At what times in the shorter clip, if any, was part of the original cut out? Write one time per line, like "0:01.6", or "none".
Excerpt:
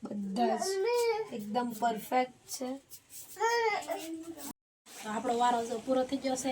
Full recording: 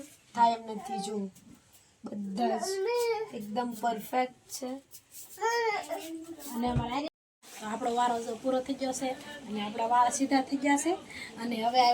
0:04.5